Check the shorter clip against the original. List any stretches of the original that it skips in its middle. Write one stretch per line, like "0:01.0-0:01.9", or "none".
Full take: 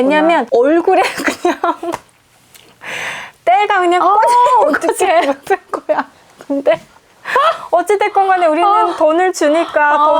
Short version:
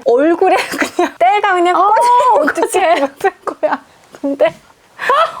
0:01.6-0:03.4